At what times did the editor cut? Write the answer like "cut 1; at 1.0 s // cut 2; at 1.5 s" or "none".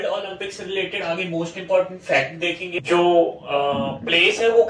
cut 1; at 2.7 s